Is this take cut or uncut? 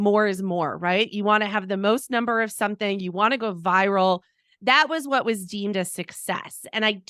uncut